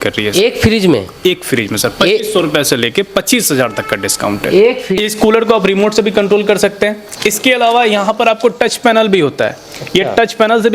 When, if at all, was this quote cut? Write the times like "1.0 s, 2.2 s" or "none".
4.9 s